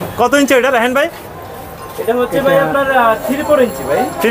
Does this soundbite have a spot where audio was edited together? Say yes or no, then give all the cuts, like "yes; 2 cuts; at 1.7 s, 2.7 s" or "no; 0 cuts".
no; 0 cuts